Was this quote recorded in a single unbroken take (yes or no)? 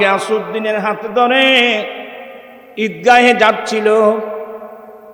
yes